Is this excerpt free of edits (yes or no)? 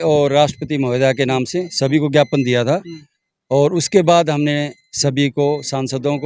yes